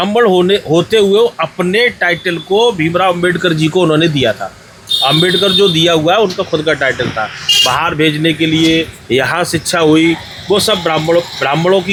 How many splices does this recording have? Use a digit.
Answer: 0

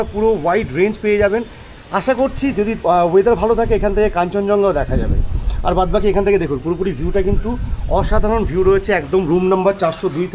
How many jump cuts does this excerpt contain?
1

